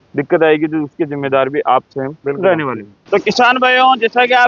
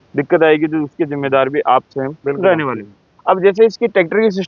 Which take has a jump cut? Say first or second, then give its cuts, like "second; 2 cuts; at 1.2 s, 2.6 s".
first; 1 cut; at 2.9 s